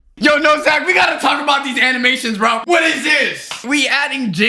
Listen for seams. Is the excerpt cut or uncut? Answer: cut